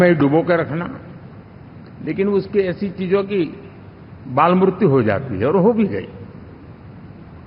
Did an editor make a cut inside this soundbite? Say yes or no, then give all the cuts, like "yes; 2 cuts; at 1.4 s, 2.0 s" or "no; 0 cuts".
no; 0 cuts